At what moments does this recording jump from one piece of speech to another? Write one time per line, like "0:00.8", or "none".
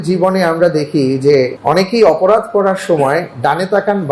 0:01.6